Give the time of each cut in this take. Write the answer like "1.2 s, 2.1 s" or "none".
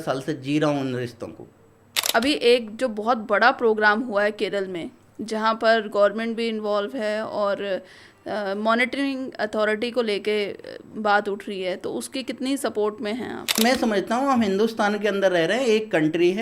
2.1 s, 13.4 s